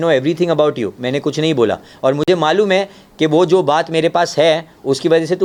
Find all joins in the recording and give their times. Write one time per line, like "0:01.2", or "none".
none